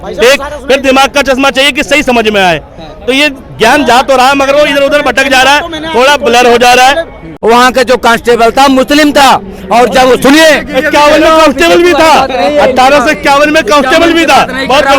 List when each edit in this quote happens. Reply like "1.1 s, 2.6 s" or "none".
7.2 s

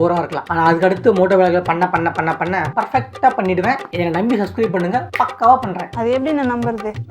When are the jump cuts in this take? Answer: 3.9 s

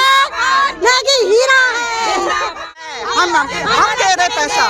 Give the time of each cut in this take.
2.9 s

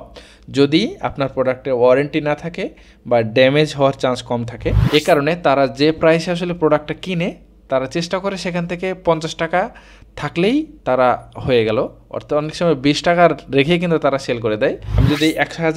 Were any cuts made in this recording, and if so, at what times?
4.8 s, 14.9 s

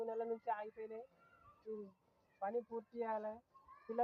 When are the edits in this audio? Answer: none

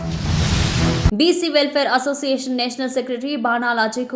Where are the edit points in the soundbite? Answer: 1.1 s

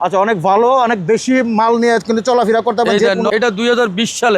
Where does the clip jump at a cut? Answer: 3.4 s

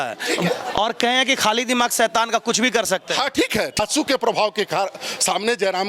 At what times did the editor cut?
3.8 s

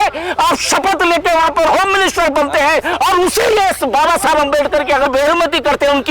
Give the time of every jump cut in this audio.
2.9 s, 5.1 s

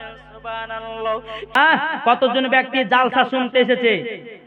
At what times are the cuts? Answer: 1.6 s

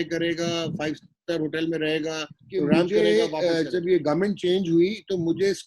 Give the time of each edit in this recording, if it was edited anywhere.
2.8 s

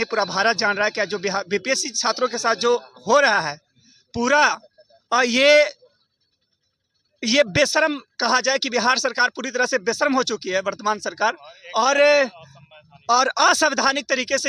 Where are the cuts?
none

